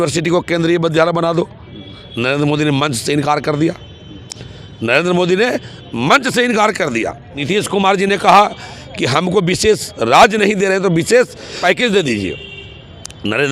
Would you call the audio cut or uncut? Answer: cut